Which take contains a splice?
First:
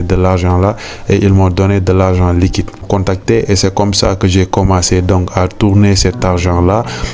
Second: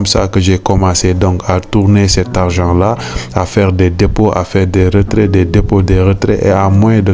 first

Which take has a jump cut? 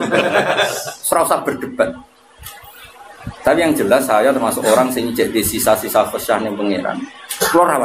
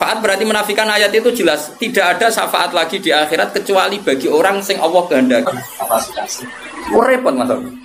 second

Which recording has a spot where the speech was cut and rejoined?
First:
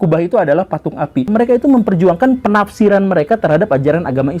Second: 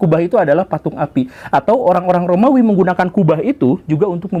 first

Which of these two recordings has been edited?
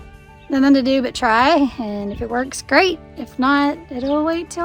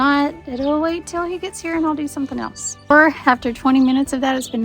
second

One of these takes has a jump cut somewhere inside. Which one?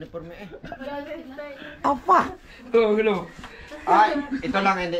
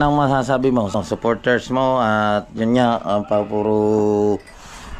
second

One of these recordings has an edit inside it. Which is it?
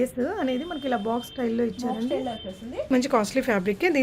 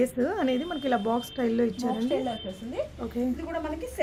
first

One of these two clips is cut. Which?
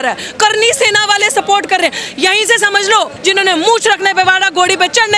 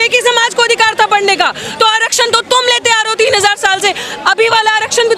first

